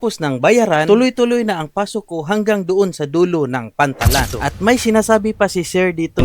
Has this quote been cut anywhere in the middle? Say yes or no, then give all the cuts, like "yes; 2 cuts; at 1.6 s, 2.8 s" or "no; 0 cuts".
yes; 1 cut; at 4.2 s